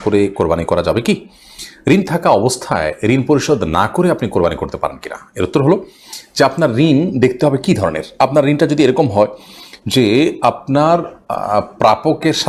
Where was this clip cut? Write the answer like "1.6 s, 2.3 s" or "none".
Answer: none